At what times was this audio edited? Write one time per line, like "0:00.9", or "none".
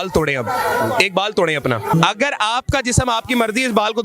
0:01.9